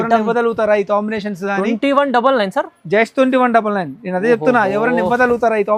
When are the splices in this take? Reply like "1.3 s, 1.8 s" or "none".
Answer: none